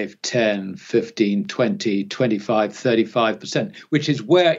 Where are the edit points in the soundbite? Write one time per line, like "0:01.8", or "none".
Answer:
none